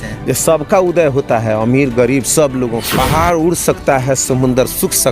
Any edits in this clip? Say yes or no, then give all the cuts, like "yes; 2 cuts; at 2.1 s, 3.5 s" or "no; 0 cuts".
yes; 1 cut; at 2.9 s